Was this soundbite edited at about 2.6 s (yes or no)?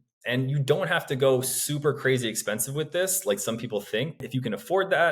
no